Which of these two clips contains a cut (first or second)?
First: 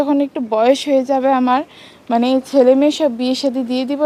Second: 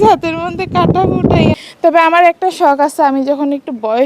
second